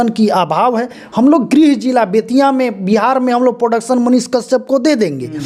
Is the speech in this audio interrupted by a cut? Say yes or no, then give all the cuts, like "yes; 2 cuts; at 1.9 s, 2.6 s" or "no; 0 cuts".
no; 0 cuts